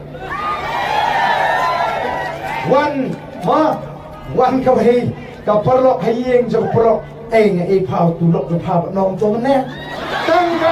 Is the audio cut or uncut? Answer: uncut